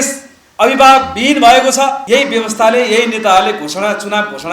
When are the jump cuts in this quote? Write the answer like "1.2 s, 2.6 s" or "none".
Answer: 2.0 s